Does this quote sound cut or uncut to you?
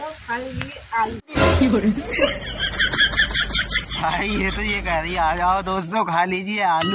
uncut